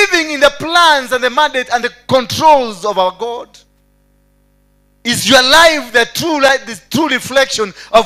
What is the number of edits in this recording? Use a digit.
0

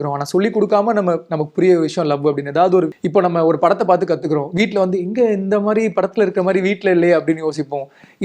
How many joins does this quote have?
1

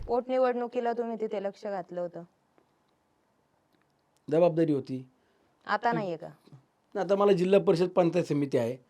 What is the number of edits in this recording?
0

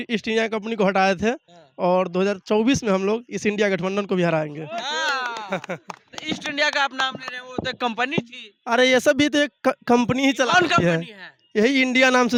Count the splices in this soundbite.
0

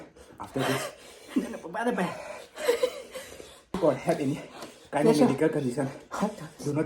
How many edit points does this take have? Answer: 1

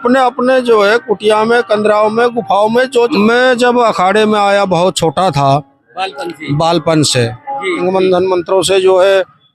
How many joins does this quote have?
2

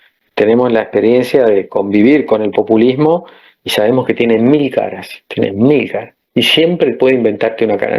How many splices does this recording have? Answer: 0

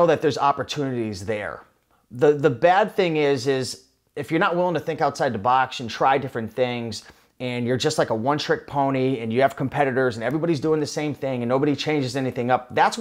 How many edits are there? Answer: 0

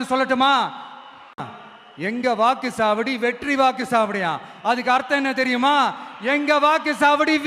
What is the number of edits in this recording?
1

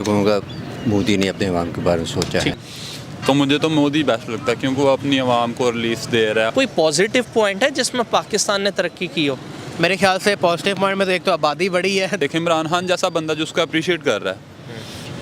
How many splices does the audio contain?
3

